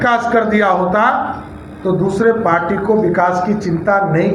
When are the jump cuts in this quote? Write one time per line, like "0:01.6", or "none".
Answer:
none